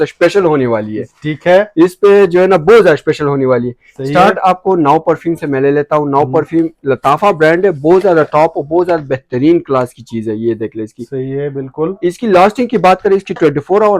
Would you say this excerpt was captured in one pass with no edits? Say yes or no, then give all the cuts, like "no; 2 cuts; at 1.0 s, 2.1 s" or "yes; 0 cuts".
yes; 0 cuts